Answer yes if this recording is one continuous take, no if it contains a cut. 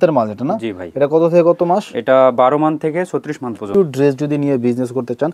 no